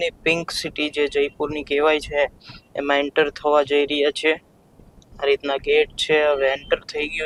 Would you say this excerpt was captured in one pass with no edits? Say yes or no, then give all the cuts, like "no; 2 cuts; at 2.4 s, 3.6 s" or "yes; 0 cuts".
yes; 0 cuts